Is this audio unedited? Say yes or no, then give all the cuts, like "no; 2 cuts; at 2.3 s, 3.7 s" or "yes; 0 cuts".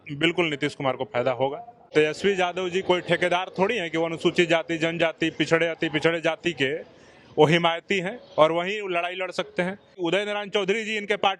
no; 2 cuts; at 1.9 s, 10.0 s